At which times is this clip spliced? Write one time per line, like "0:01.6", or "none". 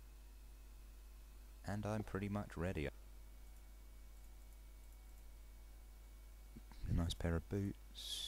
none